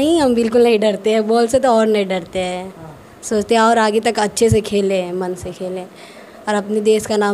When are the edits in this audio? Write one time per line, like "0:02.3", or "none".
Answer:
none